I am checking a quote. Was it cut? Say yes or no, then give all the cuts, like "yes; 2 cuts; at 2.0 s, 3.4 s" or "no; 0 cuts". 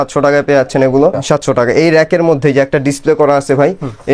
yes; 1 cut; at 1.2 s